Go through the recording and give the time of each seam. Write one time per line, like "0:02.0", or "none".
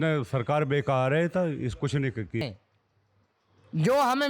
0:02.4